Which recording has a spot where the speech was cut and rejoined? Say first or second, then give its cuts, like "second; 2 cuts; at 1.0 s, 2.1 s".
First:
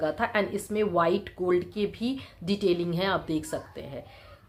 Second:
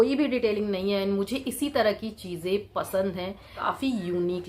second; 1 cut; at 3.6 s